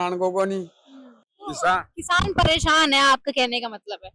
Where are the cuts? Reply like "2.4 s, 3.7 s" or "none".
none